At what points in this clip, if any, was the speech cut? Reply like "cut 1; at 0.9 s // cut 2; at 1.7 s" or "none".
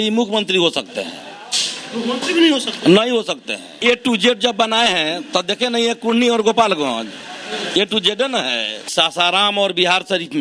cut 1; at 3.7 s // cut 2; at 8.9 s